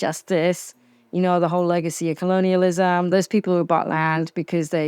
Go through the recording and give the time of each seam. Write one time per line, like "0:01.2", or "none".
0:03.1

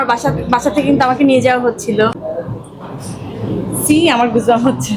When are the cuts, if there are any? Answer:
0:02.2

